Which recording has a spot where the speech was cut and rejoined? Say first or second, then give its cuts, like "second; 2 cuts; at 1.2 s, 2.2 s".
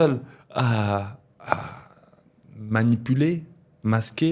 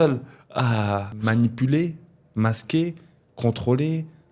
second; 1 cut; at 1.1 s